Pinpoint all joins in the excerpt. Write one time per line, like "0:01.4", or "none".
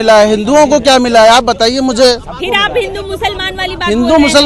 none